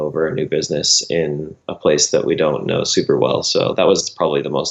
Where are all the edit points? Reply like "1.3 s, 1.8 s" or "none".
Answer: none